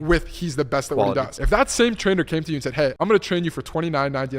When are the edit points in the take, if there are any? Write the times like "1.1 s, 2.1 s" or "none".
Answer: 1.3 s, 2.9 s